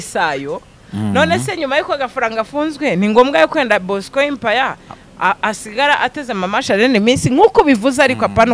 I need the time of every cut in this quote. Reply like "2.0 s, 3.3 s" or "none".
none